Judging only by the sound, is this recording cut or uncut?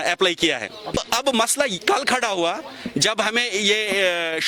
cut